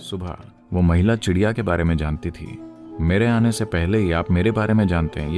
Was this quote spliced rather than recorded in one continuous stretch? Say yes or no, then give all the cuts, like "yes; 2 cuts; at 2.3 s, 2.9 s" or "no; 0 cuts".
no; 0 cuts